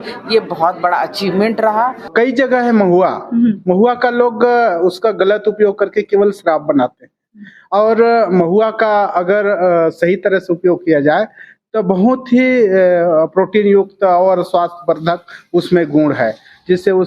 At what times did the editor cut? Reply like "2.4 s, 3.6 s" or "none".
2.1 s

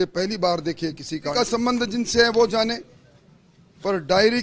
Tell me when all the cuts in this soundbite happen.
1.3 s

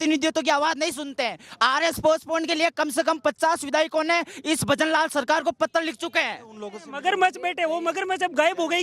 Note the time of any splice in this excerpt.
6.8 s

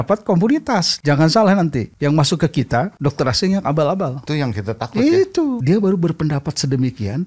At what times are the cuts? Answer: 0.9 s, 1.9 s, 2.9 s, 4.2 s, 5.6 s

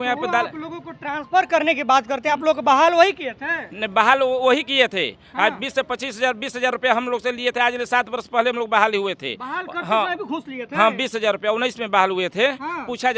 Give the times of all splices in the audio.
none

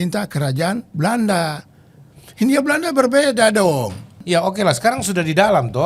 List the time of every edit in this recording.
4.2 s

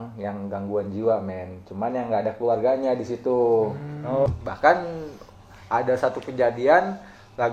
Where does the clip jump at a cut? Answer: 4.3 s

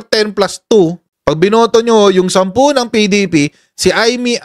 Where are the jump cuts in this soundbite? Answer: 1.1 s

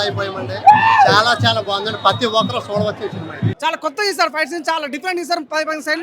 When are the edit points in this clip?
3.5 s

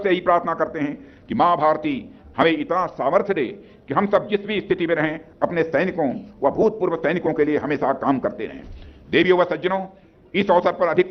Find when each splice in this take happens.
none

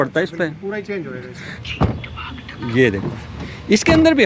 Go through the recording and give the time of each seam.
1.6 s

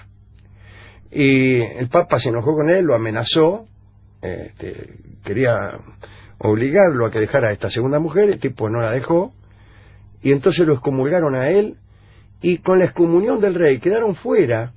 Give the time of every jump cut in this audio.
none

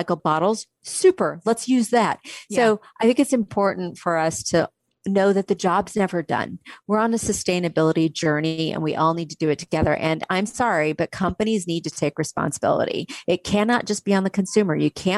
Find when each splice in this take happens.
none

